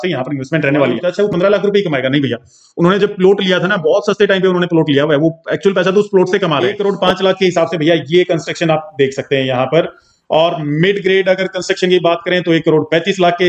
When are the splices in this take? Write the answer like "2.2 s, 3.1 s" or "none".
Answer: 1.0 s, 6.7 s